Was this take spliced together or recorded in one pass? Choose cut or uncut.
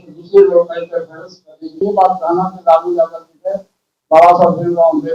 cut